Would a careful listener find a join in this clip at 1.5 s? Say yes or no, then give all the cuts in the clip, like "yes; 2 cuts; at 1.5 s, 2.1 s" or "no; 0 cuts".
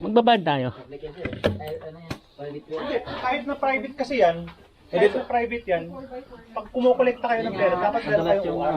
no; 1 cut; at 2.8 s